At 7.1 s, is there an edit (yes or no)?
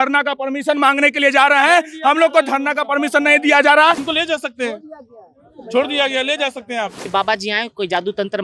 yes